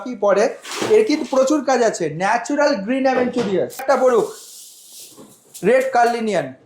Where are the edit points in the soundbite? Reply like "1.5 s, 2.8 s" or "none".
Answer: 3.8 s